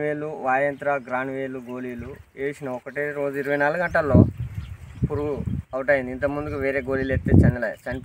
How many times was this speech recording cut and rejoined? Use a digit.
0